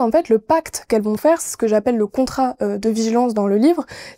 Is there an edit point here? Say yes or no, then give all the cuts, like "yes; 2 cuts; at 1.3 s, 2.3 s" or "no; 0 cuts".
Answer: no; 0 cuts